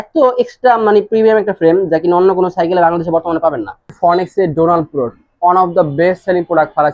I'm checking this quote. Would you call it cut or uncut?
cut